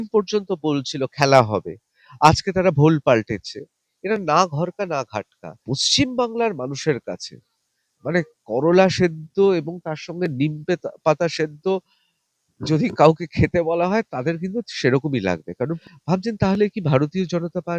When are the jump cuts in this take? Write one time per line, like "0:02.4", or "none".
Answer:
0:05.6
0:15.8